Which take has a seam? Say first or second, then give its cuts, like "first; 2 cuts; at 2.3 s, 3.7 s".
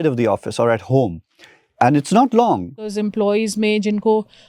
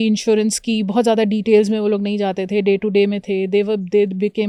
first; 1 cut; at 2.9 s